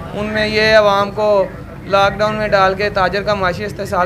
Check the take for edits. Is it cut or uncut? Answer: uncut